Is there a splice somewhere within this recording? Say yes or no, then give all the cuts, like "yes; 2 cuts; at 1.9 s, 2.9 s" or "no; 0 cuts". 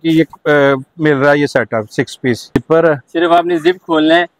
yes; 1 cut; at 2.5 s